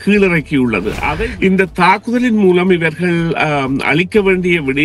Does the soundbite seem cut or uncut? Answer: cut